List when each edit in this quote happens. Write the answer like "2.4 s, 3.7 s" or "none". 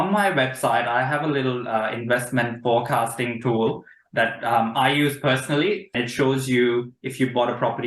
5.9 s